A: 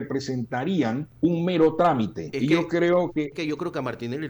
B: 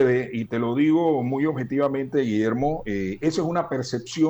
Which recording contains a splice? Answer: A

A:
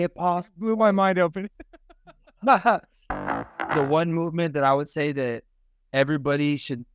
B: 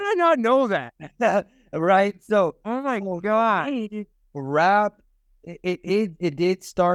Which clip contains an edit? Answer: A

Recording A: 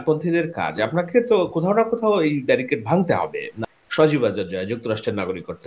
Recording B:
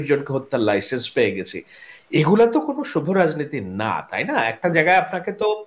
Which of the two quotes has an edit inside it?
A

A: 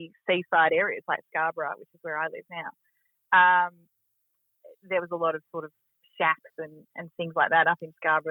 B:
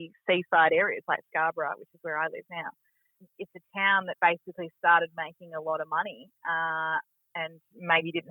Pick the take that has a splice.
B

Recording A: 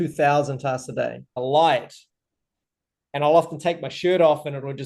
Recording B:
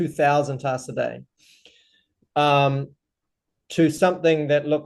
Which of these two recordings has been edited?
A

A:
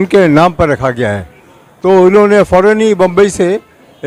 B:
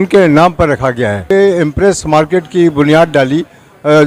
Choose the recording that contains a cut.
B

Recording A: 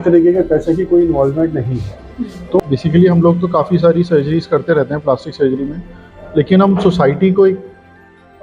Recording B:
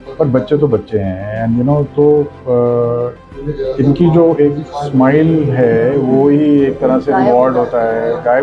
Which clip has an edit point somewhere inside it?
A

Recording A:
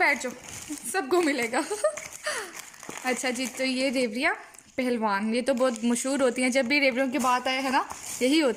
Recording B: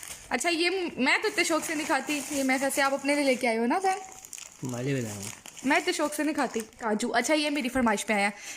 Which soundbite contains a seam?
B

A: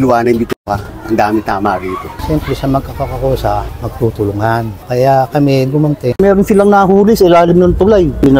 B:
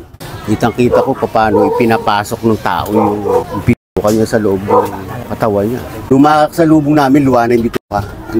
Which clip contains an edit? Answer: A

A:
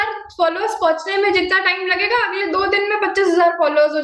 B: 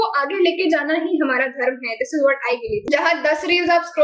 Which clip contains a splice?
B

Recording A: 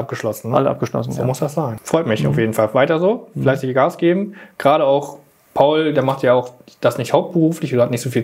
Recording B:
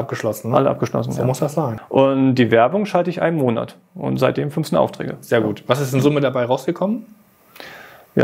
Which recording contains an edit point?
B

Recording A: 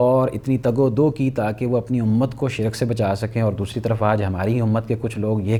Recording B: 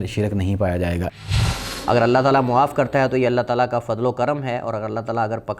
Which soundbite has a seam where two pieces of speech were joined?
B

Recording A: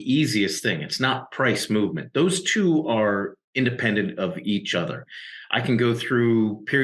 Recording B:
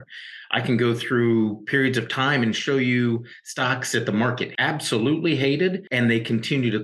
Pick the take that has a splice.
B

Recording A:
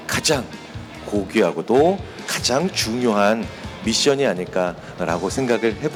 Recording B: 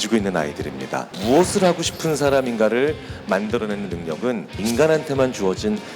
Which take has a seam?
B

